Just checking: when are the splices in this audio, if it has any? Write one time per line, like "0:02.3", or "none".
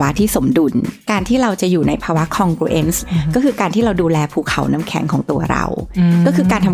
0:01.0
0:03.0